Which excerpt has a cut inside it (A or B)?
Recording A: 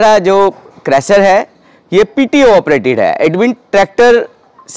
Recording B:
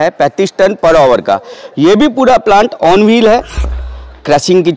B